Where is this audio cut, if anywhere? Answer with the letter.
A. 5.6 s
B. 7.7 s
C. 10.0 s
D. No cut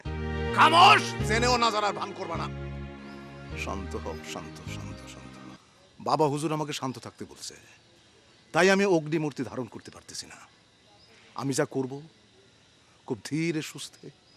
A